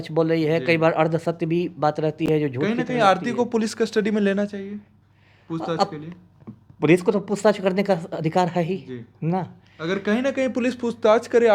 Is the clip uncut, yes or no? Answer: yes